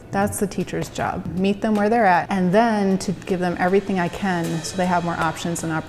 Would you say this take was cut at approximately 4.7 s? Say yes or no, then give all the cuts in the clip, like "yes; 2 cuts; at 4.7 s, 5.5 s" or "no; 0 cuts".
no; 2 cuts; at 1.2 s, 2.3 s